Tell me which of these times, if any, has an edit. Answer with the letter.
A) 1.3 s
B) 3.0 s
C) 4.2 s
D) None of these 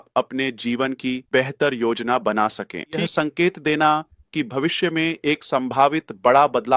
B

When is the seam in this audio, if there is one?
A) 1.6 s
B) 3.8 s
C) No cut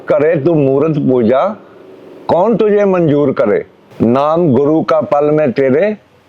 B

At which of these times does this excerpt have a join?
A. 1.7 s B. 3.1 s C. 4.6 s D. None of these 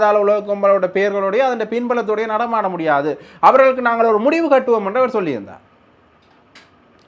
D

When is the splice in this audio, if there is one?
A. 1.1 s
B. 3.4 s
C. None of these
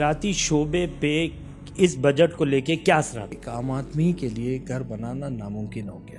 B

